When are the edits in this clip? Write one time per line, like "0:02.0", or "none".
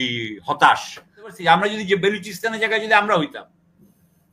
0:01.4